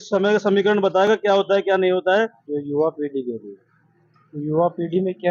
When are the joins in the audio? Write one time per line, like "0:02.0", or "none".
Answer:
0:02.4